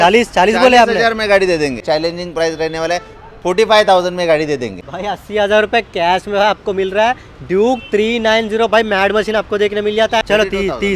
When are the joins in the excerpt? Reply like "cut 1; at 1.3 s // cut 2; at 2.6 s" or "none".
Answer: cut 1; at 1.8 s // cut 2; at 4.8 s // cut 3; at 10.2 s